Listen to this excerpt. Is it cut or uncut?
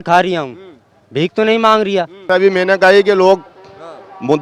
cut